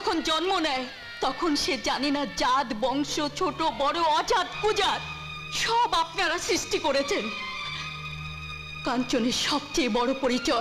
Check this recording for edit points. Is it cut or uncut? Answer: uncut